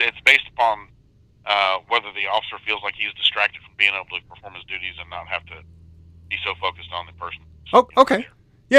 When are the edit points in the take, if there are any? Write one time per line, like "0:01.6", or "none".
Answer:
none